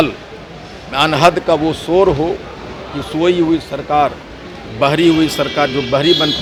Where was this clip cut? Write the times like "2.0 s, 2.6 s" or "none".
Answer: none